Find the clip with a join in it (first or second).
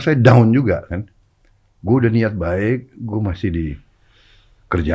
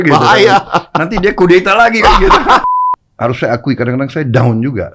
second